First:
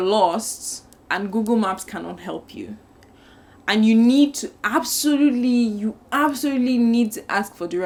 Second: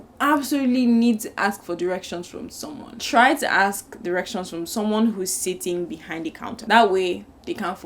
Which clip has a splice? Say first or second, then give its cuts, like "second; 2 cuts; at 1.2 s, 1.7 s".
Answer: second; 2 cuts; at 3.0 s, 6.6 s